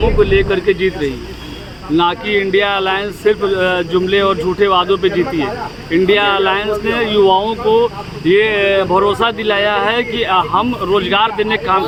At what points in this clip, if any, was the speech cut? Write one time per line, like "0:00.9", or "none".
none